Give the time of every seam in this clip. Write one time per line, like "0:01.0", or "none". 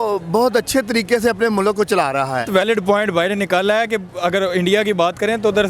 0:02.5

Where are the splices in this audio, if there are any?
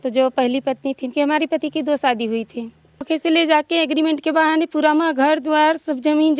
0:03.1

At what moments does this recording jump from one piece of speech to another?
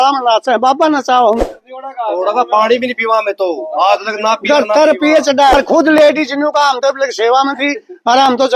0:01.4
0:05.5

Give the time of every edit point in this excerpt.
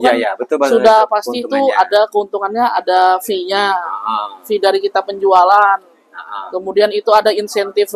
none

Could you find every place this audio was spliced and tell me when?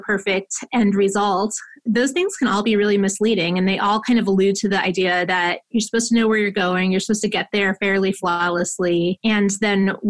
0:01.7
0:09.2

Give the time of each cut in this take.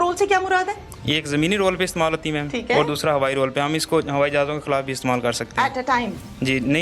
none

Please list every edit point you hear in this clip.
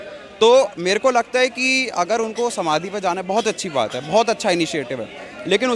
none

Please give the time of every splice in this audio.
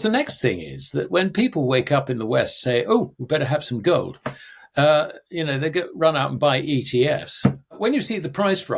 0:07.8

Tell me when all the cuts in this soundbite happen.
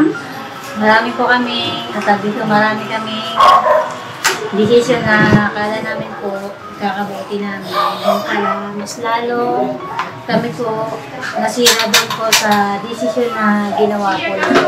none

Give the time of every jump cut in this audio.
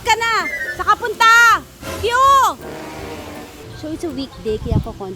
0:03.6

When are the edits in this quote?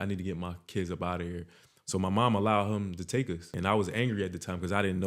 0:03.5

